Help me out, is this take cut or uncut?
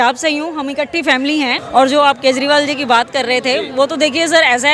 cut